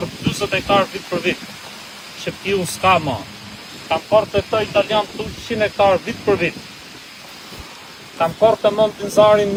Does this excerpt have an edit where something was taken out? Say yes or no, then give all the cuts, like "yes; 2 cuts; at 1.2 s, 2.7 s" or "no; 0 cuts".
no; 0 cuts